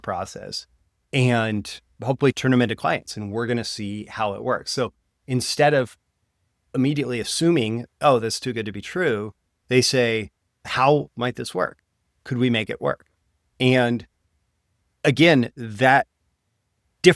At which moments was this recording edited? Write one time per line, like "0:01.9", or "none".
0:02.3
0:10.6

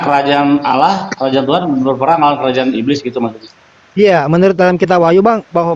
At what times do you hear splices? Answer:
none

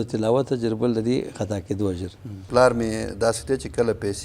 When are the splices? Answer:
0:02.5

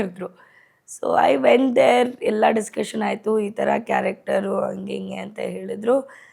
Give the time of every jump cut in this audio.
none

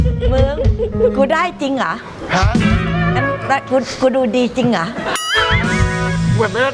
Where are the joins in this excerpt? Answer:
none

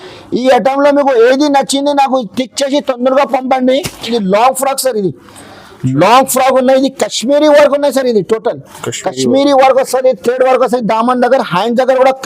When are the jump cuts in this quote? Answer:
0:04.1

